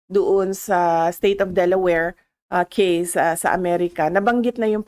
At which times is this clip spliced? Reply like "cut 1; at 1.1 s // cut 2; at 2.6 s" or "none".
none